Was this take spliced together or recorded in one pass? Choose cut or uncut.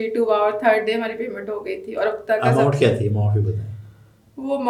uncut